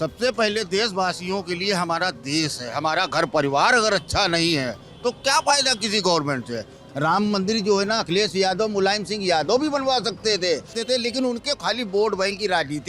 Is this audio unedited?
no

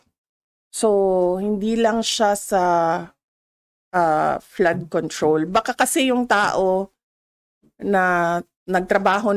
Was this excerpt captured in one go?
yes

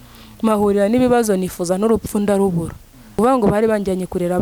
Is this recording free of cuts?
no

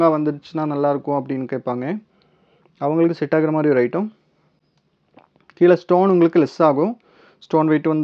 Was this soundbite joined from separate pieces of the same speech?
no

